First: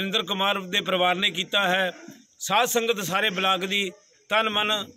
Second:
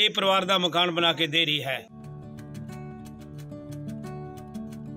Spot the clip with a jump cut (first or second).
second